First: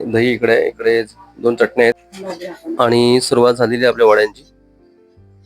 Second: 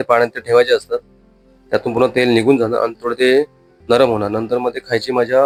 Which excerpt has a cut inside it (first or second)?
first